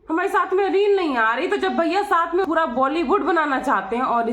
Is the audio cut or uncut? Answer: cut